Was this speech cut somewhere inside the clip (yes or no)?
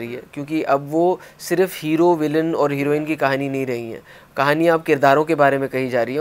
no